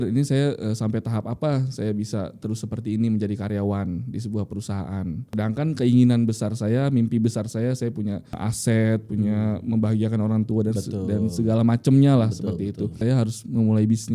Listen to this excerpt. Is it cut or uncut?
cut